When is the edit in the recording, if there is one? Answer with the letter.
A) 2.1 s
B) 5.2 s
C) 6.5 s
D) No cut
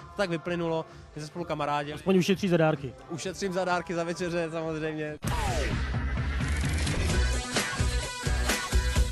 B